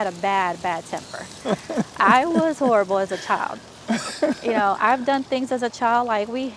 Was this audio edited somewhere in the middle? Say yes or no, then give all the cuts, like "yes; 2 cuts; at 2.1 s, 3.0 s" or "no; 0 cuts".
no; 0 cuts